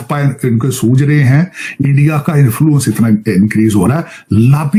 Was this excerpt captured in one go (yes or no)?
yes